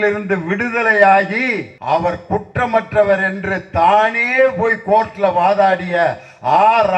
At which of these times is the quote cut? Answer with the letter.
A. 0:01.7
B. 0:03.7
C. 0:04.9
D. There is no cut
A